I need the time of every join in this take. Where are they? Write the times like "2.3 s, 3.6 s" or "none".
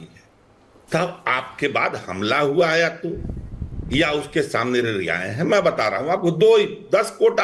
none